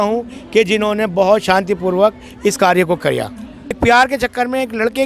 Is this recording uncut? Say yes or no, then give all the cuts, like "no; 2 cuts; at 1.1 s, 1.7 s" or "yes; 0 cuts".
no; 1 cut; at 3.7 s